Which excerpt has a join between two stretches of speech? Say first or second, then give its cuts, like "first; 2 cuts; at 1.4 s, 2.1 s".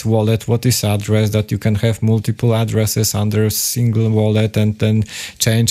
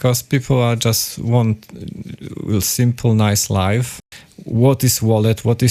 second; 1 cut; at 4.0 s